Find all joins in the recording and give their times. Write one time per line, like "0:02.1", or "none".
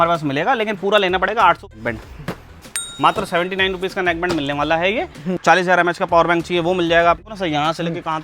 0:01.7
0:05.3
0:07.2

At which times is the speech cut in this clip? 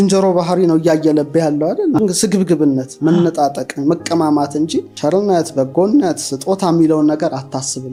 none

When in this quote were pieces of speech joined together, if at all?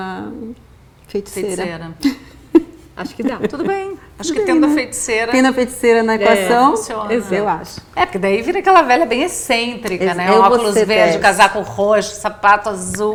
none

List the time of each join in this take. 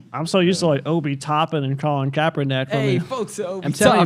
none

